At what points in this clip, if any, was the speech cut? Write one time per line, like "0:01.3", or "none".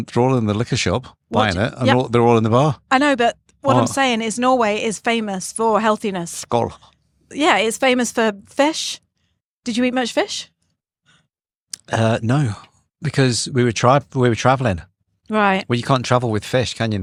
none

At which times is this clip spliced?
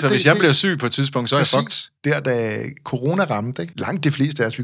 0:01.8
0:03.7

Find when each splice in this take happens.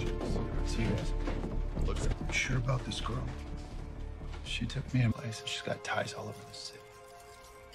0:02.1

